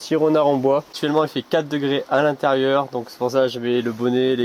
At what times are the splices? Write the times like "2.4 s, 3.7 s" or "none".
1.0 s